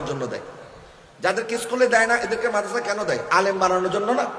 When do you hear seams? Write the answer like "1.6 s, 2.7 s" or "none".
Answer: none